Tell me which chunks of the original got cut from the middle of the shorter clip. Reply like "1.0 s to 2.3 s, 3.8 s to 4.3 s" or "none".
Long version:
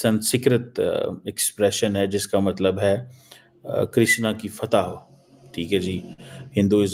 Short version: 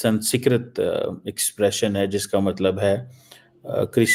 none